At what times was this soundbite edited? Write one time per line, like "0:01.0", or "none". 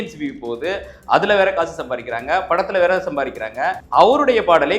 0:03.8